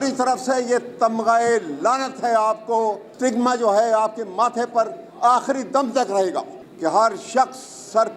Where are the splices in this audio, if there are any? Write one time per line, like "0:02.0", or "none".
0:03.1
0:06.6